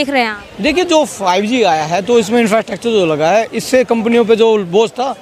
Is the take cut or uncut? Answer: uncut